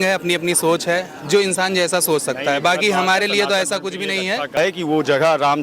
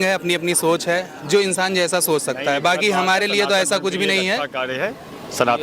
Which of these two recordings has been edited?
first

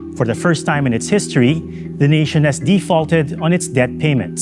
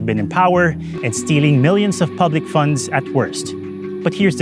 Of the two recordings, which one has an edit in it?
second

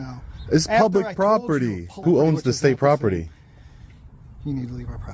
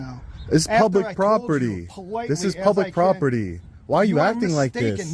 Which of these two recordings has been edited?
first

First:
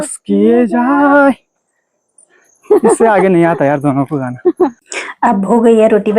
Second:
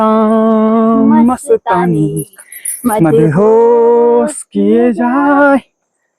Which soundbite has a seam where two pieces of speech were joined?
first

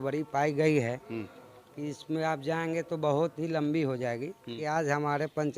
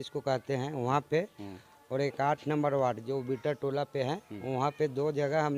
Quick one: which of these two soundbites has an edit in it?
first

